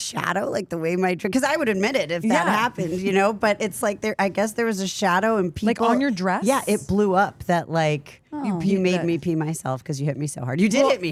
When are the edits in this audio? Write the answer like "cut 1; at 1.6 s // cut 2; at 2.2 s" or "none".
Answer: none